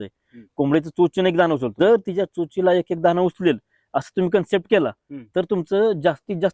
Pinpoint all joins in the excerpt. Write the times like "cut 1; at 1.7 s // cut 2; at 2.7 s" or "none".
cut 1; at 1.7 s